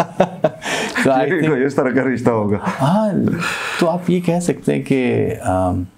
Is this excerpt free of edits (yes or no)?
yes